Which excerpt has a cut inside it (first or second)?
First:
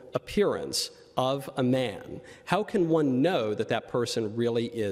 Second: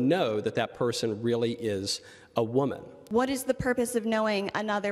second